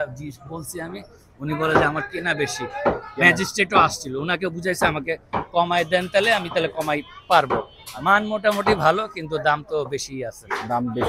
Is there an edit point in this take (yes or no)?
no